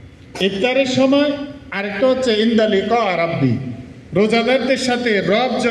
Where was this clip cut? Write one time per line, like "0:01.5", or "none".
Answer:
none